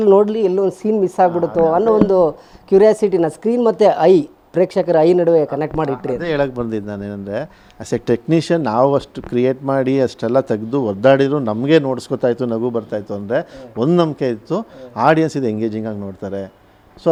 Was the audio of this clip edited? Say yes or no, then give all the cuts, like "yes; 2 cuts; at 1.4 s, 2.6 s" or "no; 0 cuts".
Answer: no; 0 cuts